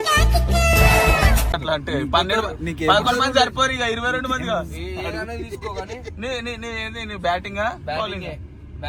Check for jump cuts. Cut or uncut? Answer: uncut